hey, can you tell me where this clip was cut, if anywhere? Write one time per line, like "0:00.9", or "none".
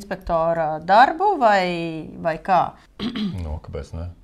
0:02.8